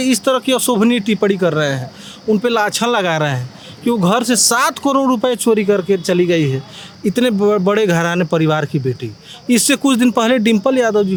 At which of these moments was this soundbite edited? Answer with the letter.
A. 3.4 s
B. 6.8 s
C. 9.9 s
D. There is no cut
D